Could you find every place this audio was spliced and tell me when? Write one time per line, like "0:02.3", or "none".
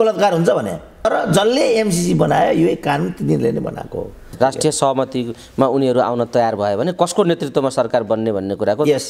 0:04.2